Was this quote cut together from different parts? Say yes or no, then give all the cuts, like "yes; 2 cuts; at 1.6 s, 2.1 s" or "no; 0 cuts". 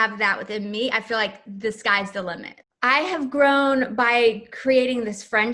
yes; 1 cut; at 2.5 s